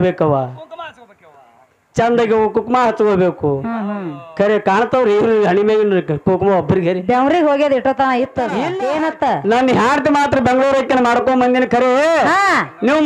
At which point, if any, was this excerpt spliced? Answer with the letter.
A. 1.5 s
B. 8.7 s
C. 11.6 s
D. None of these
B